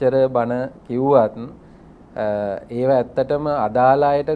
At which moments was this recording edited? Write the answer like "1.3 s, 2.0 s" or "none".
none